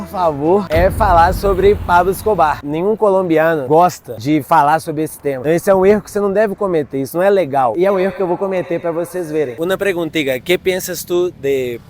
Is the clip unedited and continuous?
no; 3 cuts; at 2.6 s, 7.7 s, 9.5 s

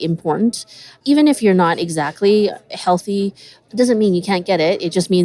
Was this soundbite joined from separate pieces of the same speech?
no; 0 cuts

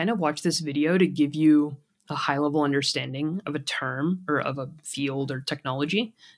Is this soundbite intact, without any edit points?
yes; 0 cuts

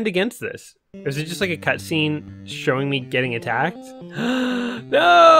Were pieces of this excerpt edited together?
no; 0 cuts

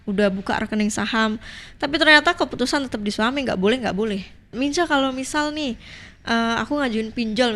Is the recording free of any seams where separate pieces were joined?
no; 1 cut; at 4.4 s

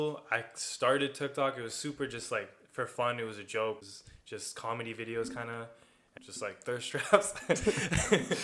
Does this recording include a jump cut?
yes; 2 cuts; at 3.8 s, 6.1 s

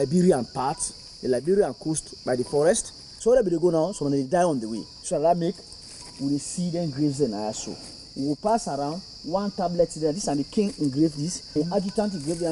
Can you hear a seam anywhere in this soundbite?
yes; 3 cuts; at 3.1 s, 4.9 s, 11.4 s

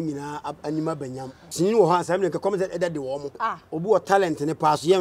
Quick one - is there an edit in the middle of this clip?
yes; 2 cuts; at 1.4 s, 3.3 s

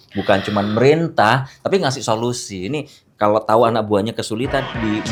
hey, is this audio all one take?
yes; 0 cuts

